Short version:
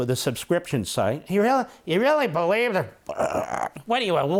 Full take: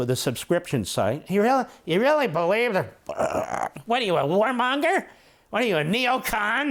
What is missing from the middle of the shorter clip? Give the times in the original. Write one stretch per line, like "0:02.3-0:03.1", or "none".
none